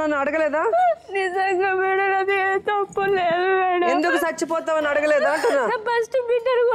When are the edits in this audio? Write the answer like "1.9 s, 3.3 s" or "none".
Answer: none